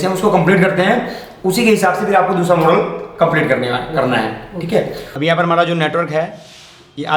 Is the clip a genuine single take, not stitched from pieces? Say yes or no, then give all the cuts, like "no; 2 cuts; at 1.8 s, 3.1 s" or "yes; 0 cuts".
no; 1 cut; at 5.0 s